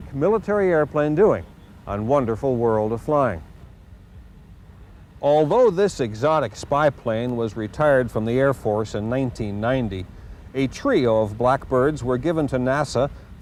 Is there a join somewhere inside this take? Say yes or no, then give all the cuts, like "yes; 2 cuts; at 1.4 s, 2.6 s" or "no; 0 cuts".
no; 0 cuts